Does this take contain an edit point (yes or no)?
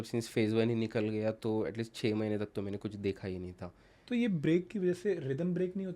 yes